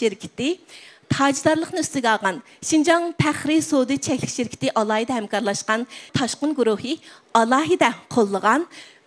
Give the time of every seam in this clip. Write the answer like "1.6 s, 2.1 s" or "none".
none